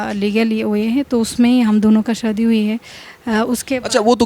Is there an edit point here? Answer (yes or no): no